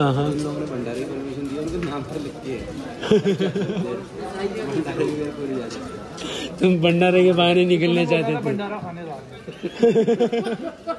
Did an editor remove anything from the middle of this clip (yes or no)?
no